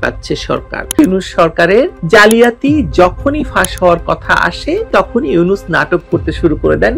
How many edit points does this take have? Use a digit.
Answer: 1